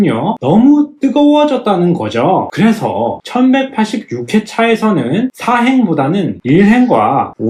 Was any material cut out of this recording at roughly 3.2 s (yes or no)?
no